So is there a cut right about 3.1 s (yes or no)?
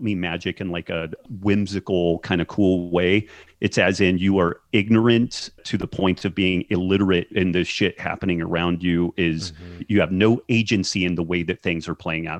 no